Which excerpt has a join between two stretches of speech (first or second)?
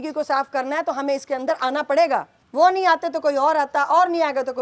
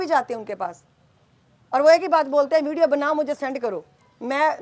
first